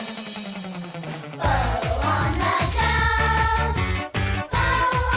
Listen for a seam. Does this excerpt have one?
no; 0 cuts

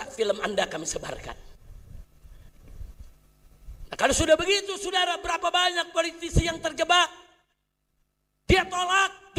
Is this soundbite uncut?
yes; 0 cuts

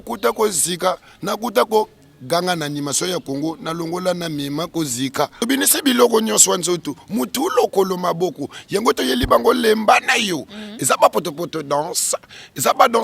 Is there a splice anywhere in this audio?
yes; 1 cut; at 5.5 s

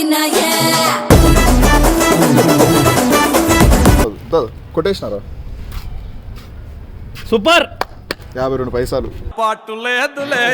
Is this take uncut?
no; 1 cut; at 4.0 s

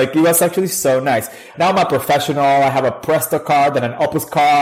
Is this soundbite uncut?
no; 1 cut; at 1.5 s

